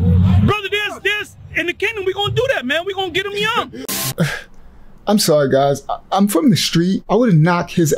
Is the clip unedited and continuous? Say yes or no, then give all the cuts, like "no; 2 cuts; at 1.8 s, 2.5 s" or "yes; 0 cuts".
no; 2 cuts; at 3.8 s, 7.0 s